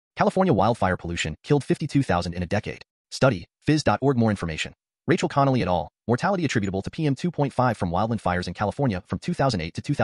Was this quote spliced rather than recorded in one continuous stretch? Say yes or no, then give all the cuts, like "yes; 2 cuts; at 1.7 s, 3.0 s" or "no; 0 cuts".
no; 0 cuts